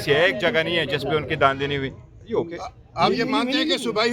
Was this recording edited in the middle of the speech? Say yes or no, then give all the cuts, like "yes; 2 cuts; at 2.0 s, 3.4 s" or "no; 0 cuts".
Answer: yes; 1 cut; at 0.9 s